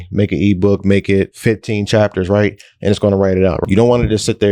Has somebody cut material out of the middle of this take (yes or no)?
yes